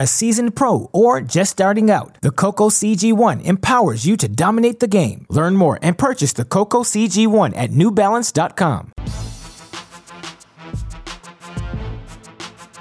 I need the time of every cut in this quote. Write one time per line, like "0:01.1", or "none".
0:08.9
0:11.8